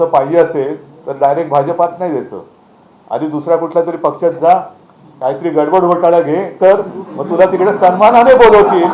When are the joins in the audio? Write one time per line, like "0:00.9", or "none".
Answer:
none